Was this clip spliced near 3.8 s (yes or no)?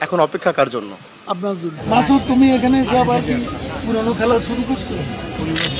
no